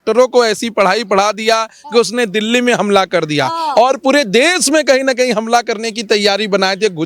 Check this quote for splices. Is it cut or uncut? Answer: uncut